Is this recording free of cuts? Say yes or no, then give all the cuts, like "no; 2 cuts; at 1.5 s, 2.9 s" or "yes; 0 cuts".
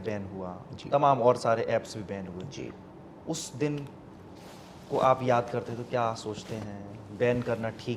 yes; 0 cuts